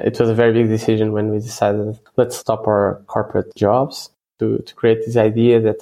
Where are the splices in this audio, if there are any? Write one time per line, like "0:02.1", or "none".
0:02.1
0:03.5
0:04.3